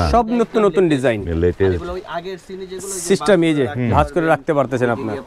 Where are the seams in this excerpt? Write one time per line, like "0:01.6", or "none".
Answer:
none